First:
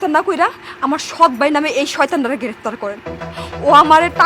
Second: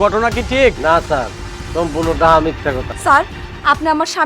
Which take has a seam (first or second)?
second